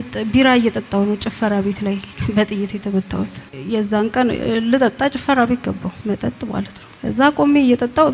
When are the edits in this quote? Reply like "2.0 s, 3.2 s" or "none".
none